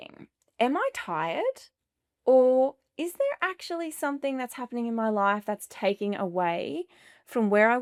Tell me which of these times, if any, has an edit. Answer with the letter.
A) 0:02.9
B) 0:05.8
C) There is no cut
C